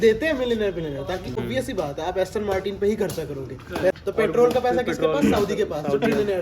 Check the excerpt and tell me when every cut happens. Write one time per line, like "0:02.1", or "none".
0:01.4
0:03.9